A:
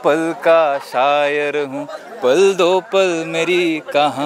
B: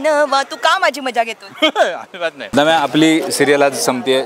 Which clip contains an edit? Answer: B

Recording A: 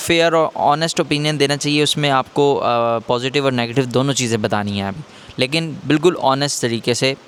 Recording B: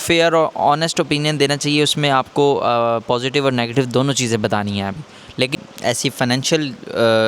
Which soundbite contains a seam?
B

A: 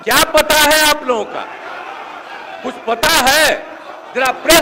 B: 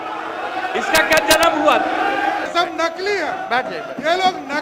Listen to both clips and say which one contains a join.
B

